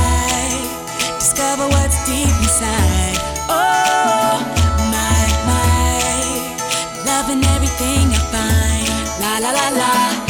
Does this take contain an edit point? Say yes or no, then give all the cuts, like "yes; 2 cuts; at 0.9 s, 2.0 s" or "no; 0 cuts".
no; 0 cuts